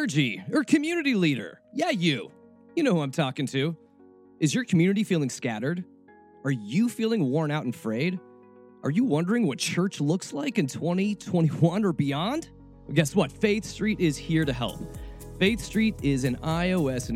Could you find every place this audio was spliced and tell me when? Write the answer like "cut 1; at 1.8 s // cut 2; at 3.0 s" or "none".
cut 1; at 1.6 s